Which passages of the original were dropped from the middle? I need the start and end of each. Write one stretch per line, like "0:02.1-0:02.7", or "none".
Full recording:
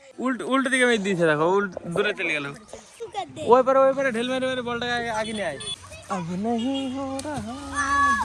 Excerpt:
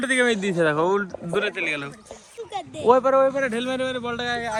none